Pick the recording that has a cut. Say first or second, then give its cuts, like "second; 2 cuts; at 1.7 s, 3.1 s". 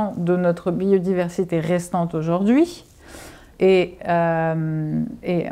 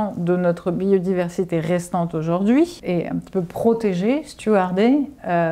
second; 1 cut; at 2.8 s